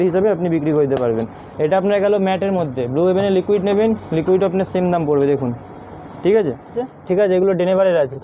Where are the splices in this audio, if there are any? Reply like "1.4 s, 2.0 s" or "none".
6.9 s